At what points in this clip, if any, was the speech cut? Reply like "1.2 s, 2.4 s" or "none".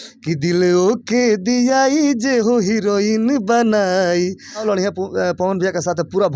4.6 s